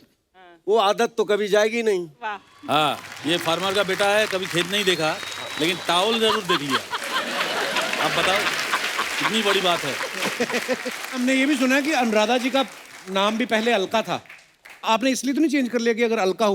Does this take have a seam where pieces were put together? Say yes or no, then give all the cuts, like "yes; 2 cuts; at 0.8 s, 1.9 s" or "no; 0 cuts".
yes; 1 cut; at 11.2 s